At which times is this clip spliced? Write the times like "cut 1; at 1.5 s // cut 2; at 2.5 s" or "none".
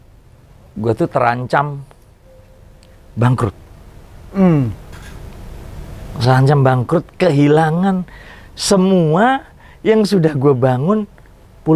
none